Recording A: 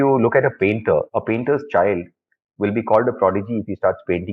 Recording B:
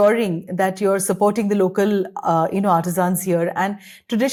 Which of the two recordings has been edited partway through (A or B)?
A